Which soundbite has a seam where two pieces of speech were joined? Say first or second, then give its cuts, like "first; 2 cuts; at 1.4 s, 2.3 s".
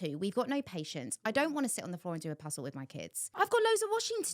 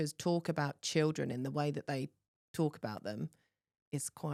first; 1 cut; at 3.3 s